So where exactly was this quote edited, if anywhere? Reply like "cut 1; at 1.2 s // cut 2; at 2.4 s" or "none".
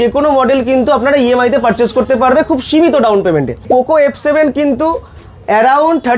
cut 1; at 3.7 s